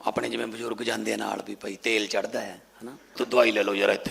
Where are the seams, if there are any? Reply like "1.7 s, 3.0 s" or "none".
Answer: 3.1 s